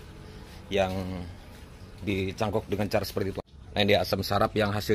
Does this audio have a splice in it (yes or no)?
yes